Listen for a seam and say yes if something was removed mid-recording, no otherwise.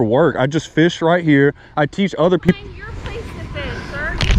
no